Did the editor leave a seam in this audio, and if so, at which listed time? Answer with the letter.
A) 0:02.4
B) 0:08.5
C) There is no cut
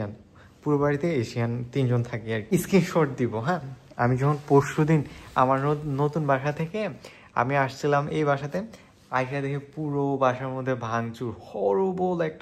A